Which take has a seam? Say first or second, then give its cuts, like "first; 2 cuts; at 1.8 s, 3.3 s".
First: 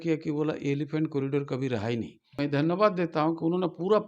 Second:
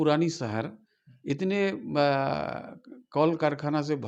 first; 1 cut; at 2.4 s